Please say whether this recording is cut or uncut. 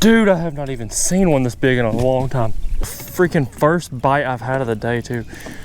cut